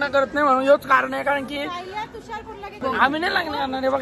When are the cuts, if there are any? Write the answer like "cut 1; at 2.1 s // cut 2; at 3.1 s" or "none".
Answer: cut 1; at 2.8 s